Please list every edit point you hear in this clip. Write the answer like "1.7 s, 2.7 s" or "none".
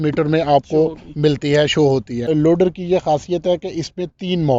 2.2 s